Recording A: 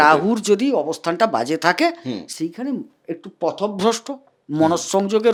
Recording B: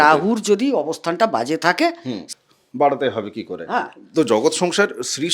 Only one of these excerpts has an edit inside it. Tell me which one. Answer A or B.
B